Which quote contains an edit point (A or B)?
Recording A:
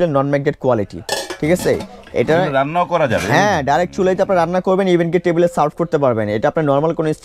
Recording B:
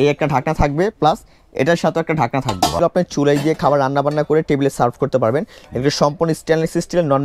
B